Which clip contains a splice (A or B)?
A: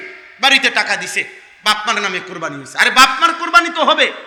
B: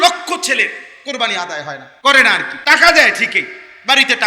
B